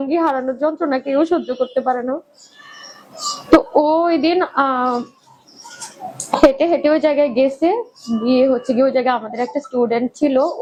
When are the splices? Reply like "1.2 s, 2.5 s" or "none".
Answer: none